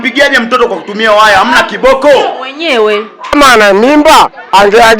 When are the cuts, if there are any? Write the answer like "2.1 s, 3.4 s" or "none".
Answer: 3.3 s